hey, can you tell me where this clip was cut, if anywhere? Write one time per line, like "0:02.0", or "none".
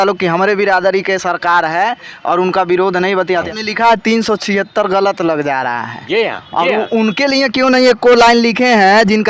0:03.5